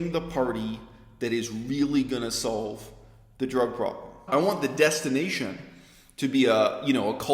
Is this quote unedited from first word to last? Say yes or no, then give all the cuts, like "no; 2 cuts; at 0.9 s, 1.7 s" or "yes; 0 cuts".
no; 1 cut; at 4.2 s